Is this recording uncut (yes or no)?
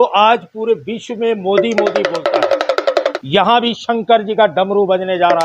no